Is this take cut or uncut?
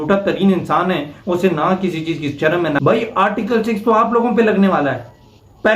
cut